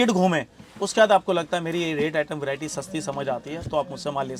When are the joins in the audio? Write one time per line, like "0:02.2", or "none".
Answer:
none